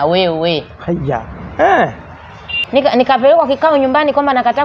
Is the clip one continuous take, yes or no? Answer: no